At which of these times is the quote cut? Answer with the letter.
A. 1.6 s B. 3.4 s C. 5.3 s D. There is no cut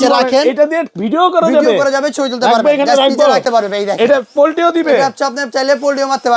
B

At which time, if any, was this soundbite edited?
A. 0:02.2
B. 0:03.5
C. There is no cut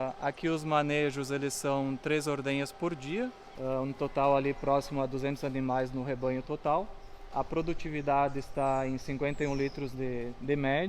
B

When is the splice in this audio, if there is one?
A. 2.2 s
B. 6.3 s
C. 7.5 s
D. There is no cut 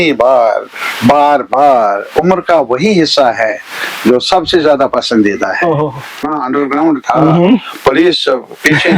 B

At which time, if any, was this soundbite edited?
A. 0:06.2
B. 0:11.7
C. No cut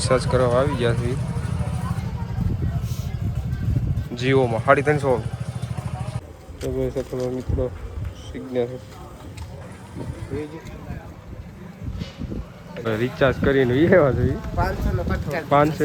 A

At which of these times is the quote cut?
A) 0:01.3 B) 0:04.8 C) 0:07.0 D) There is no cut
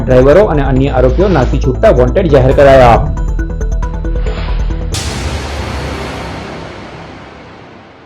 B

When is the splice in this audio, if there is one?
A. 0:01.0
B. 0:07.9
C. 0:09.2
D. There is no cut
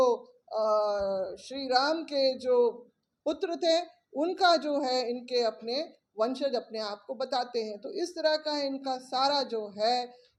D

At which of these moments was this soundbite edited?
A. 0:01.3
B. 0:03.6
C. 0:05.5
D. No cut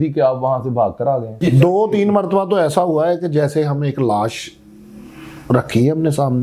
A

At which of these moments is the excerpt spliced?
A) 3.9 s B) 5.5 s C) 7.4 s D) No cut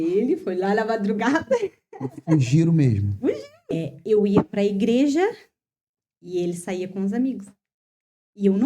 A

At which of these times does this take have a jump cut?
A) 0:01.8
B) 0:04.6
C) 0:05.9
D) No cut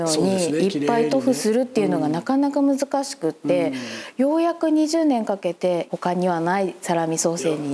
C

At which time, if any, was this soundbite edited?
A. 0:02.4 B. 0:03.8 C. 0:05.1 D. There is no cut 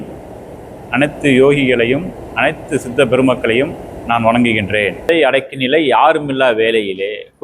C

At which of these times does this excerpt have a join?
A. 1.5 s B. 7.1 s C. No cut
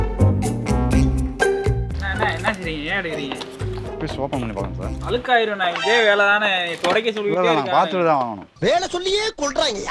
C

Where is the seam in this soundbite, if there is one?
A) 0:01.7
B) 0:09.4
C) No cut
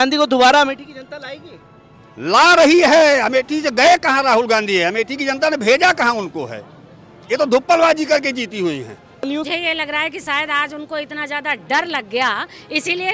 B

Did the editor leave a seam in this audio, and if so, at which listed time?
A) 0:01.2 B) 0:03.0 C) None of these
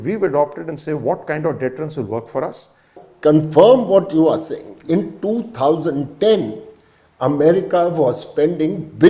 B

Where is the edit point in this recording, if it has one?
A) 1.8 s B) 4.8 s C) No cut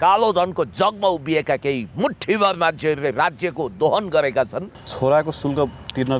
B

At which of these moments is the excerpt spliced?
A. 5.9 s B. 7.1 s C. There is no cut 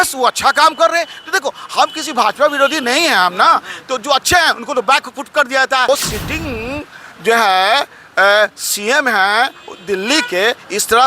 A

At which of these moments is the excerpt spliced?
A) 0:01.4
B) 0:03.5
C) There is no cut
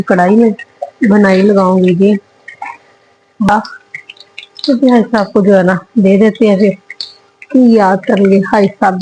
B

